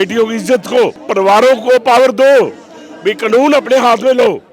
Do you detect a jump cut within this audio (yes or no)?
yes